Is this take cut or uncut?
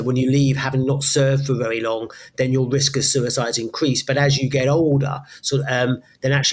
uncut